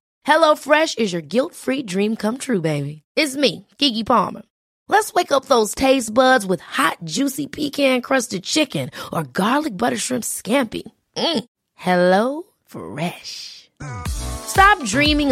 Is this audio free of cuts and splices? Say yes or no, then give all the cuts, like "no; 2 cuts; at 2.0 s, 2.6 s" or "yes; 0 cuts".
yes; 0 cuts